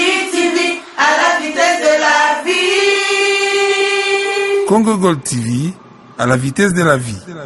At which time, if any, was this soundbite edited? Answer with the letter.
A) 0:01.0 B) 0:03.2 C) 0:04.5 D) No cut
D